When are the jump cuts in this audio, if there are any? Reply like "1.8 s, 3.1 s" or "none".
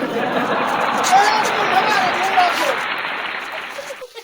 none